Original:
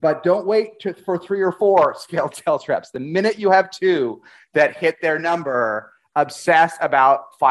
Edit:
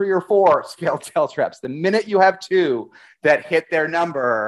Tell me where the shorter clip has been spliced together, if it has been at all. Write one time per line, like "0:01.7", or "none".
none